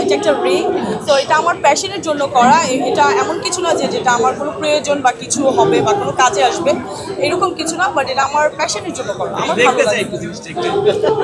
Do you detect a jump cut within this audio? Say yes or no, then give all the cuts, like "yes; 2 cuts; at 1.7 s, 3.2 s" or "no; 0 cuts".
no; 0 cuts